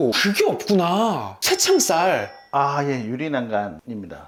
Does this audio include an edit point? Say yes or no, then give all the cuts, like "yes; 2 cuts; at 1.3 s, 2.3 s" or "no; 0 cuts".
no; 0 cuts